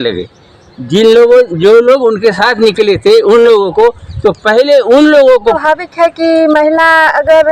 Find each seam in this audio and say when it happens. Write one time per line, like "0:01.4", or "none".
0:05.6

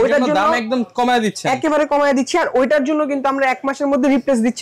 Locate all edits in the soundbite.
none

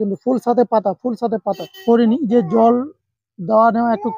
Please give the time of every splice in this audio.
0:01.8

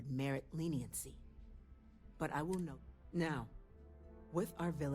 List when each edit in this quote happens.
0:02.7

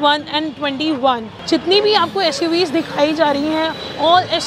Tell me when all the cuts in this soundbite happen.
0:01.3

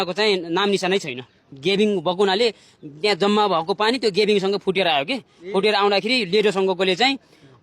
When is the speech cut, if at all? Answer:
0:01.5

